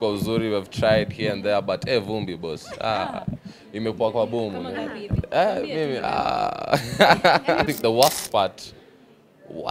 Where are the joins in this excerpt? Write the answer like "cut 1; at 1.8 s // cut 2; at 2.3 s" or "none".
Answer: cut 1; at 7.7 s